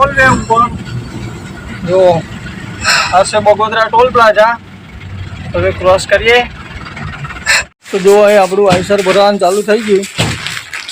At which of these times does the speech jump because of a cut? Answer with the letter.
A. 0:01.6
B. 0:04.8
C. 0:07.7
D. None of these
C